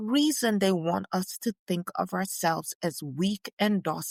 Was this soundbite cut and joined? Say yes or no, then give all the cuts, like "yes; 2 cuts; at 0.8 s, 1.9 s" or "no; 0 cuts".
no; 0 cuts